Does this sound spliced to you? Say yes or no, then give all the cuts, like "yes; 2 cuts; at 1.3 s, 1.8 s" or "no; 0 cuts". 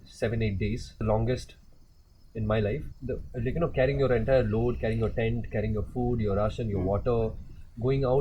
yes; 2 cuts; at 1.0 s, 2.9 s